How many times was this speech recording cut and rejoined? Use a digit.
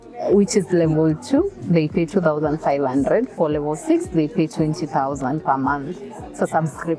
0